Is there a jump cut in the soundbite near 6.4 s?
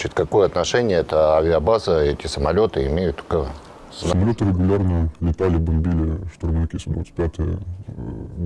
no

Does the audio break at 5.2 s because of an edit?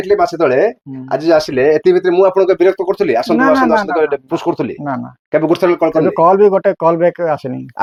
no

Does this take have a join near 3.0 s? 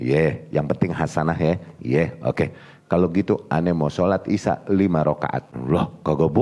no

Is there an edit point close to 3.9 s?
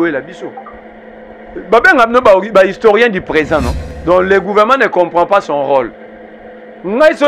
yes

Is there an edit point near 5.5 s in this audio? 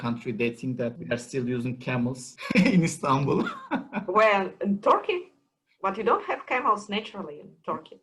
no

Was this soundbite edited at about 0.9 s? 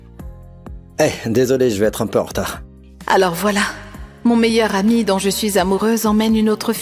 yes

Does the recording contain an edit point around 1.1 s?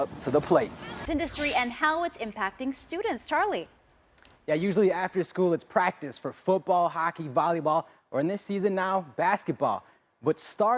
yes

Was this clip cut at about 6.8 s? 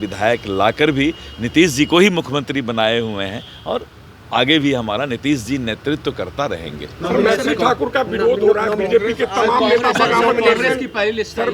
no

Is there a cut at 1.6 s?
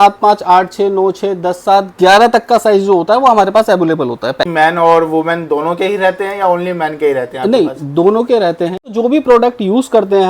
no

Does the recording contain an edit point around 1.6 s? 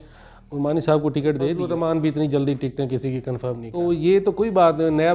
yes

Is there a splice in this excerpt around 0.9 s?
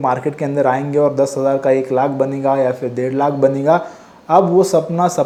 no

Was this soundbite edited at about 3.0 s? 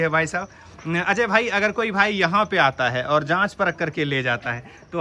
no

